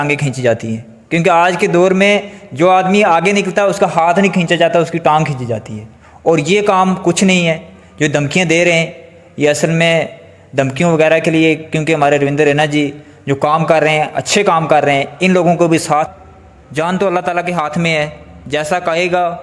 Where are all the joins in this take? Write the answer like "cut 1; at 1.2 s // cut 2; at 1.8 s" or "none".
cut 1; at 16.1 s

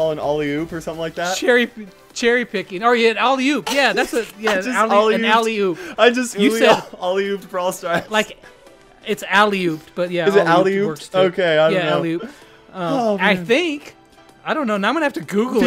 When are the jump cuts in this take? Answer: none

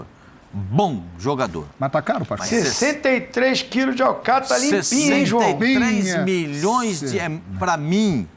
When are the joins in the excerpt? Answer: none

